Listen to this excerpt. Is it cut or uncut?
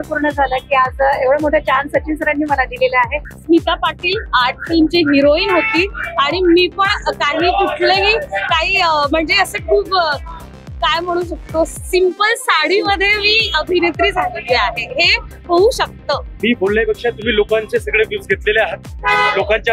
cut